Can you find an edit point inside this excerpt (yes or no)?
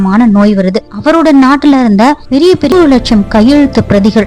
yes